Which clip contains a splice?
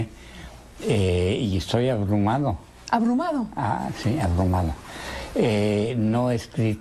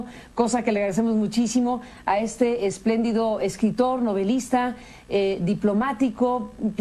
first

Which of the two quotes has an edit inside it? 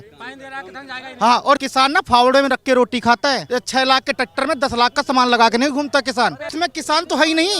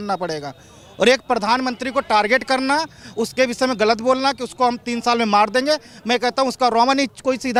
first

